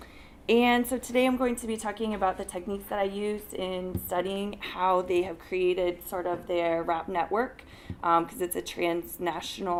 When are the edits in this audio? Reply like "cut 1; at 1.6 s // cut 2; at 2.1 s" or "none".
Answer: none